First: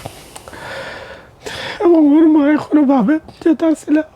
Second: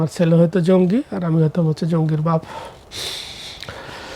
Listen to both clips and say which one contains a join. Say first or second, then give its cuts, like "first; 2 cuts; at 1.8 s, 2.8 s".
first; 1 cut; at 1.3 s